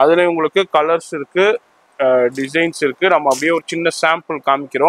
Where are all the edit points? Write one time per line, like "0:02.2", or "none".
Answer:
none